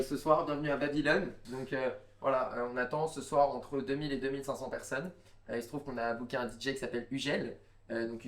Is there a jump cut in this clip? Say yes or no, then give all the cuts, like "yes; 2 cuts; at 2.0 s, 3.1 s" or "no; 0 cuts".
no; 0 cuts